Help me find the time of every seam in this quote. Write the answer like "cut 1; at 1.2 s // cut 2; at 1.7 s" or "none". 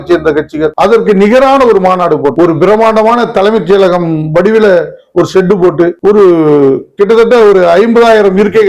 none